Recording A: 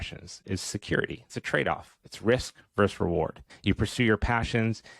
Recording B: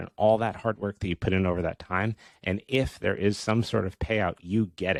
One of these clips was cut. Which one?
A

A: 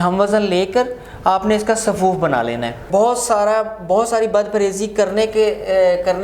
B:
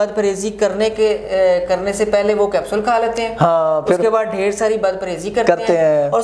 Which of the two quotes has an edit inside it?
A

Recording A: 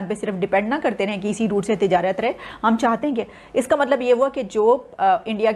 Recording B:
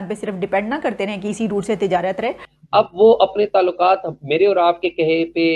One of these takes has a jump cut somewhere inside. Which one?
B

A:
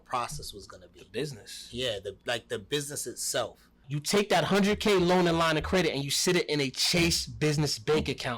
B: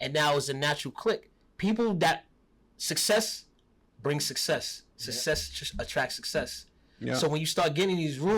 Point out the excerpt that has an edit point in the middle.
A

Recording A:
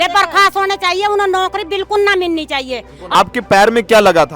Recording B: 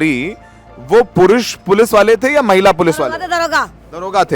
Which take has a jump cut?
A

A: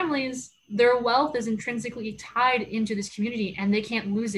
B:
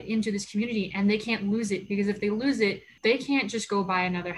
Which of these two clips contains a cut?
B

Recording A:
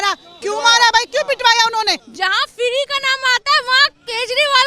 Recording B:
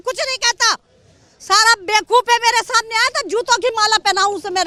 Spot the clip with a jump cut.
A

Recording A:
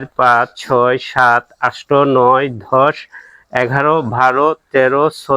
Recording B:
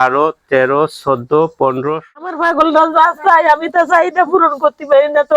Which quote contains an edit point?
B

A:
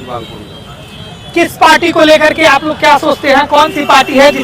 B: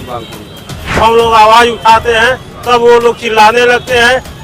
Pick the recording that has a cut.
B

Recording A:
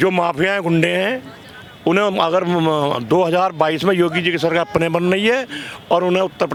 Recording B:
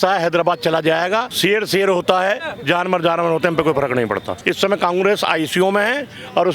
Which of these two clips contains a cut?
B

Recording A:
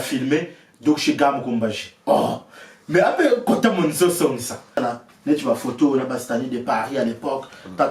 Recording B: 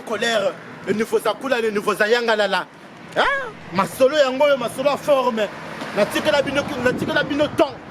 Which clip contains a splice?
A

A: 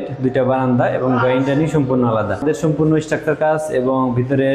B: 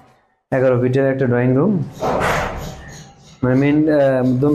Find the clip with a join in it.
A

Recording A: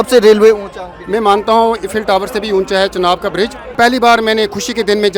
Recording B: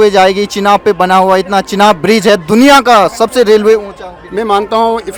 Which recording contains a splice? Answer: A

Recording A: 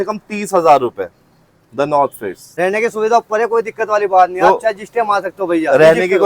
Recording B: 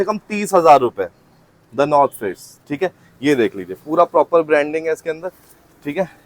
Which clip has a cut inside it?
A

